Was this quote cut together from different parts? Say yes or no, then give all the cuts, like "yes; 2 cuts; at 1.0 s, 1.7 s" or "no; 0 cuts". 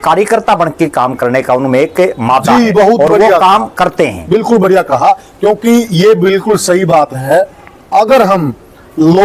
no; 0 cuts